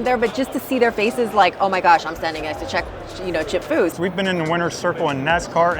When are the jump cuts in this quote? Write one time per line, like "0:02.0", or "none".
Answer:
0:03.9